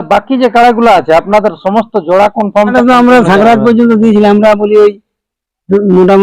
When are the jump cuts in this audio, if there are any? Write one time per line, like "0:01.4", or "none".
0:02.7